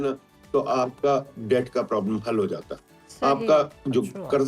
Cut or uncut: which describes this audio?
uncut